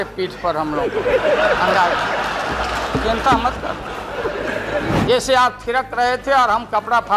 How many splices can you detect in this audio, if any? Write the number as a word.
one